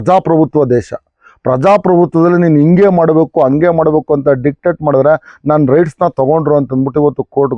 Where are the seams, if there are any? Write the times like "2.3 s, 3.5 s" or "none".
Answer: none